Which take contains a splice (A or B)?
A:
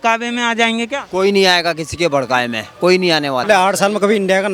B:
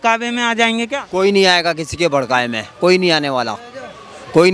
A